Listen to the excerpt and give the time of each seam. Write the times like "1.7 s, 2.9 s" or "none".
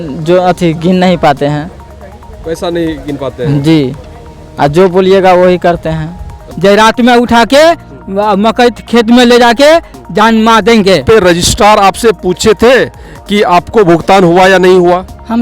6.4 s, 11.0 s